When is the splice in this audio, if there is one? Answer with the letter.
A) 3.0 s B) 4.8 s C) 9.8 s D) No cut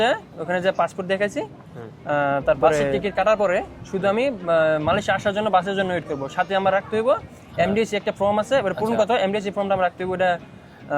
A